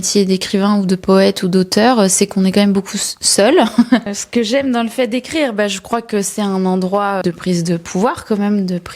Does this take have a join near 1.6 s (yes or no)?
no